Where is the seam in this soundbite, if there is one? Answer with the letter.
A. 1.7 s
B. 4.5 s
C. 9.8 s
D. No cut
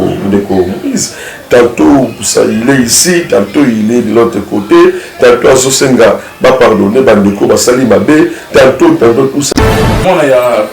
C